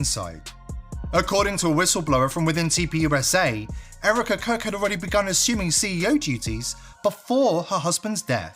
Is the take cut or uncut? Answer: uncut